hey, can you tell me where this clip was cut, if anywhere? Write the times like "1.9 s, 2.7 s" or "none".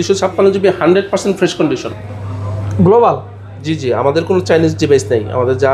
2.0 s